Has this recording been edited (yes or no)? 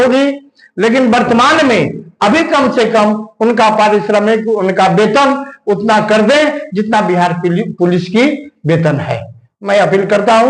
no